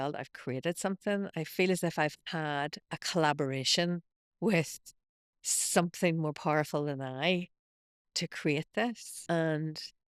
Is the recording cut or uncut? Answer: cut